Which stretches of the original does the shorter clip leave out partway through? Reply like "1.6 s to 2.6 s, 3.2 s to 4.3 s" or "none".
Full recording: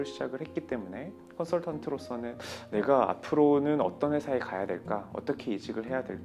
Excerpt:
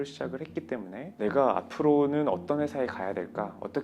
1.0 s to 2.5 s

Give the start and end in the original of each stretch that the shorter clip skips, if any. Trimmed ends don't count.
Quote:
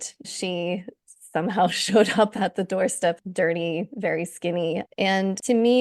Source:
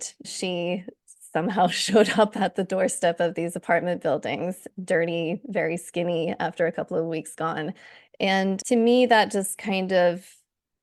3.2 s to 4.7 s, 6.4 s to 8.1 s

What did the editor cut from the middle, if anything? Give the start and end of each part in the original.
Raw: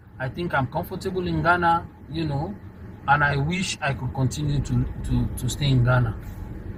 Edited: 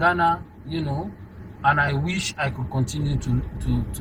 none

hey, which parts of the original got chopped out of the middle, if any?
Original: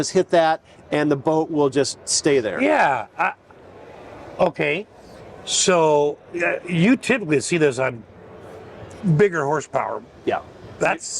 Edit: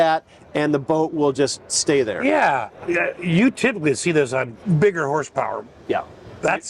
3.1 s to 6.2 s, 8.0 s to 8.9 s

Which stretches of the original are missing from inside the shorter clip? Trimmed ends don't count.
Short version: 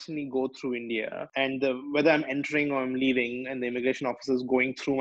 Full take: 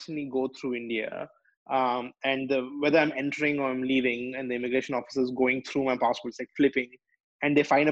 1.3 s to 2.1 s

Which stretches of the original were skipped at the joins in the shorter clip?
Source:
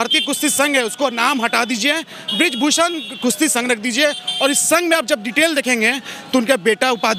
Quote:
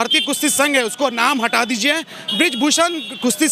none

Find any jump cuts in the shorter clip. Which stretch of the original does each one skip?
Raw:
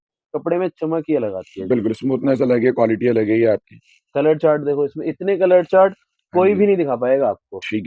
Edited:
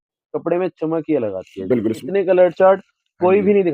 2.0 s to 5.1 s

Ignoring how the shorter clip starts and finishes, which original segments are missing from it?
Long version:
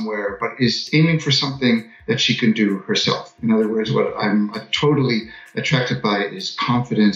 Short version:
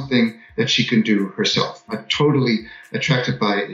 3.4 s to 4.5 s

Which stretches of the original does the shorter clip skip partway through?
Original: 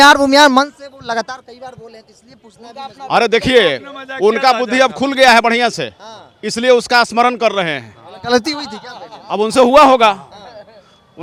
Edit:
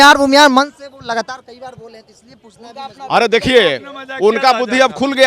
none

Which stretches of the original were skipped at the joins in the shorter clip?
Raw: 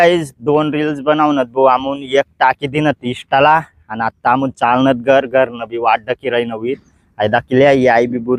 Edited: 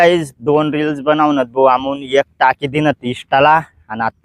none

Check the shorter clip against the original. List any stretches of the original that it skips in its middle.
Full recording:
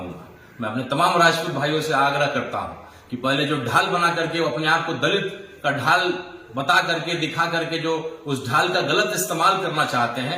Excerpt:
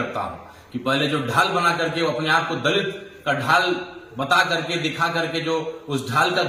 none

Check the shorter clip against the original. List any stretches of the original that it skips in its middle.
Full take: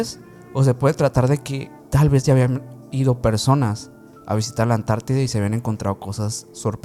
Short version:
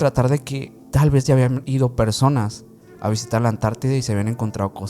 2.6 s to 2.9 s

